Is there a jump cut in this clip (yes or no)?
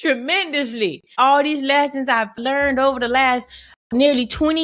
yes